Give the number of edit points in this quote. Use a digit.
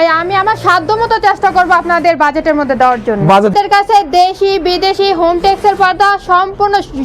1